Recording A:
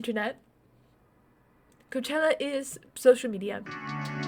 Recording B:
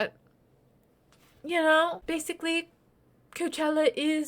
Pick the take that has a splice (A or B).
B